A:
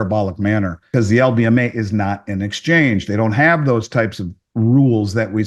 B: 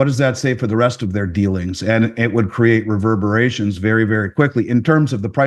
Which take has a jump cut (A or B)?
A